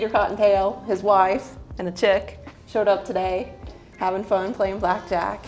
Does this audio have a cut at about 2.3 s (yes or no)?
no